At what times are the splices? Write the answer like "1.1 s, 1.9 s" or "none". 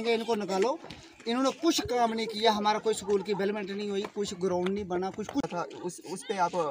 5.5 s